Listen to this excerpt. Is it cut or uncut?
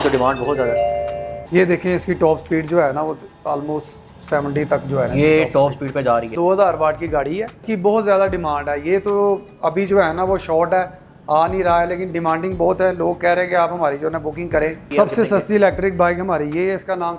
cut